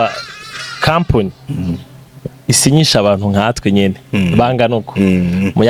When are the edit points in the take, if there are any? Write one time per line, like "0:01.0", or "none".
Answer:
none